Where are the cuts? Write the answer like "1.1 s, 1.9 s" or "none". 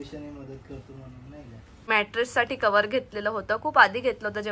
1.7 s